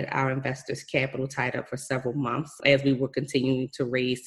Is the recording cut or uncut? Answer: cut